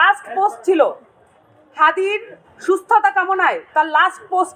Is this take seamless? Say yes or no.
yes